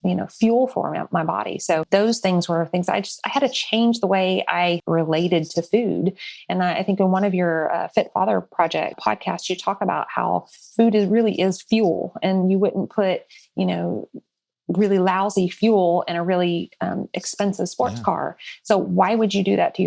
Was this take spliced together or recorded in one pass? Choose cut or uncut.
uncut